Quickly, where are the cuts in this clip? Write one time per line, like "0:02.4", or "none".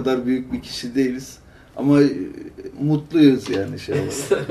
none